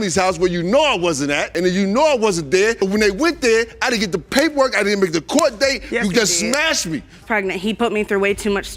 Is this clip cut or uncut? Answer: cut